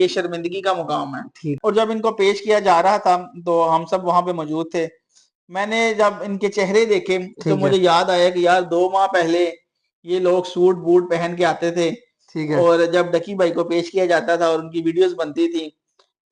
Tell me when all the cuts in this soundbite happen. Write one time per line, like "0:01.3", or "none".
0:01.6